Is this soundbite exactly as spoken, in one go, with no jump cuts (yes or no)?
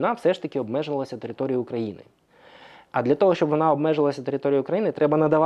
yes